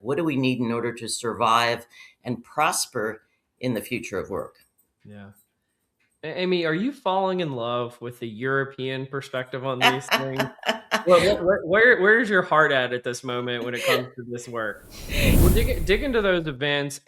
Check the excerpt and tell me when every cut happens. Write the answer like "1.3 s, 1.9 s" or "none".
15.4 s